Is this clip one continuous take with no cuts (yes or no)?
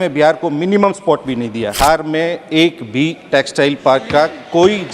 no